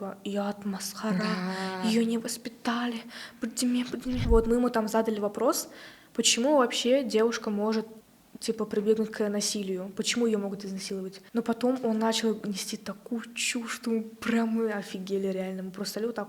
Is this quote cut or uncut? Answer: cut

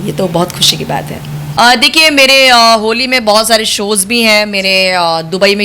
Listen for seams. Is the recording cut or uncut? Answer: cut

